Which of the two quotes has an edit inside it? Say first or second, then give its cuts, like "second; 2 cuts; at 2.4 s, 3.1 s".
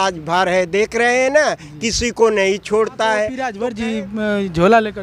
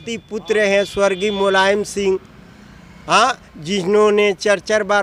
first; 1 cut; at 3.5 s